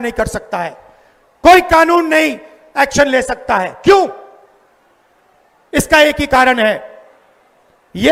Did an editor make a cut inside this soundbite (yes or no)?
no